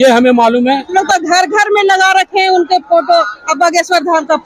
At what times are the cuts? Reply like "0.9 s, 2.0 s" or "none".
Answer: 0.9 s

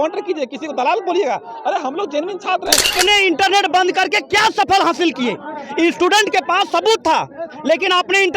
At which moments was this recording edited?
2.9 s

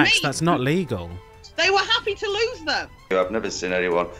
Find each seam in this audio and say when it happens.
3.0 s

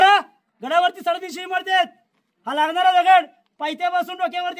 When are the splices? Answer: none

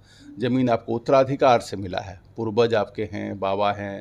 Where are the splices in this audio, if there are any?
none

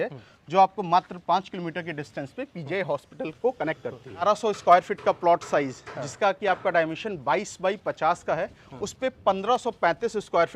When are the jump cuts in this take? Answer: 4.1 s

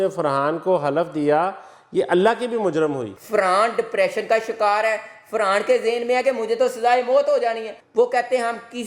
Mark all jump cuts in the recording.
3.1 s, 7.7 s

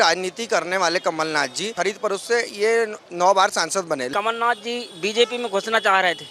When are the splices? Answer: 1.8 s, 4.1 s

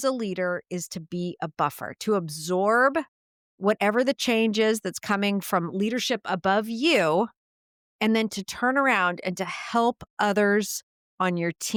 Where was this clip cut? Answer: none

